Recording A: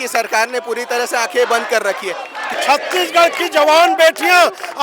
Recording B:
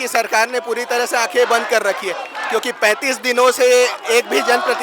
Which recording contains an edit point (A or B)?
A